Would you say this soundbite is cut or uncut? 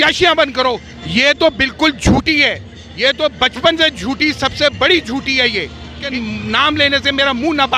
cut